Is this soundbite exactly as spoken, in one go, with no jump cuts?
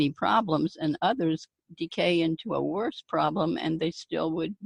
yes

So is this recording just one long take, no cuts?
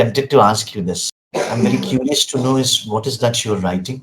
no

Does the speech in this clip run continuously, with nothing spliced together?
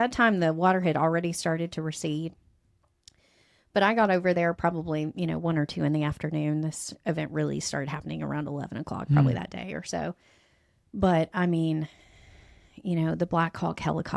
yes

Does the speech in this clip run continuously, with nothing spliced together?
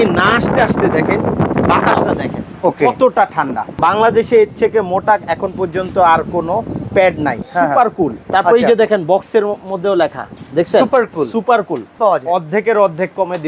no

